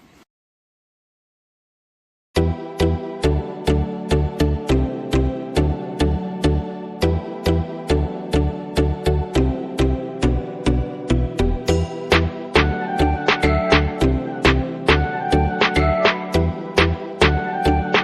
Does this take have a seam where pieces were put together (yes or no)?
no